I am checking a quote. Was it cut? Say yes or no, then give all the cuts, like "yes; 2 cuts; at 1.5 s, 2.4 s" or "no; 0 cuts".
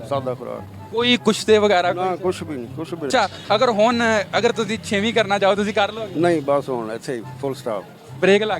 yes; 1 cut; at 3.1 s